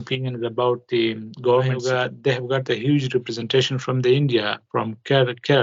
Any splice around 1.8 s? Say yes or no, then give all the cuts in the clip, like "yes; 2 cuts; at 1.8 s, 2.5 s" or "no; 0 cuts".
yes; 1 cut; at 1.8 s